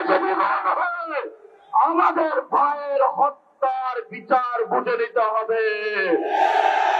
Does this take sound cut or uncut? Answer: uncut